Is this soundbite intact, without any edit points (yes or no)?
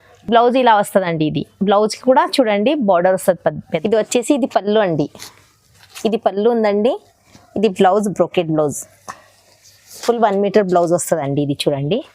no